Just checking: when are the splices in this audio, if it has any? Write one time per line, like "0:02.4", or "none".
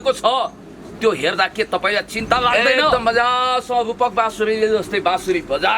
0:02.7